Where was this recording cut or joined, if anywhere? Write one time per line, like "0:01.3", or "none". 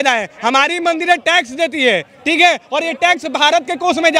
none